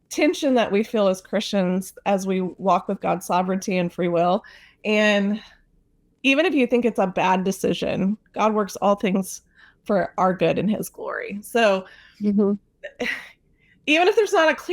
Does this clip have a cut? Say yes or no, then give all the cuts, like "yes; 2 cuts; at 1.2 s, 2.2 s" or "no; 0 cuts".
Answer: no; 0 cuts